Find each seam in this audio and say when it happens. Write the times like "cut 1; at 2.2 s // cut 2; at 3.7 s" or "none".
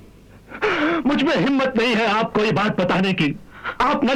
none